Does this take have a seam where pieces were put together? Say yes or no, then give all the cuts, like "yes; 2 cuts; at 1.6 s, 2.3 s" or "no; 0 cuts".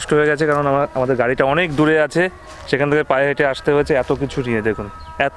no; 0 cuts